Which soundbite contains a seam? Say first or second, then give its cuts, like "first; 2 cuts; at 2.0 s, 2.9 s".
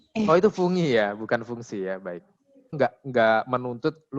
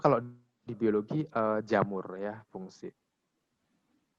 first; 1 cut; at 2.7 s